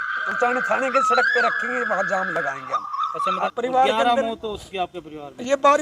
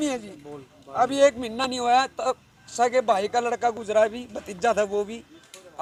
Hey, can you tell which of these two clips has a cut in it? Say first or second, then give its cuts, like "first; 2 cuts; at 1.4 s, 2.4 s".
first; 1 cut; at 3.5 s